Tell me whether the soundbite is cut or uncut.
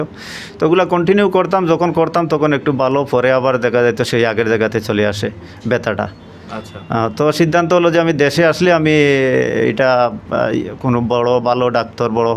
uncut